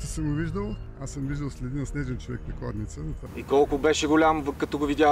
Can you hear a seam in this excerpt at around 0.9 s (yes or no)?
yes